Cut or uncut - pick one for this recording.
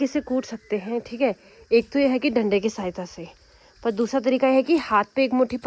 uncut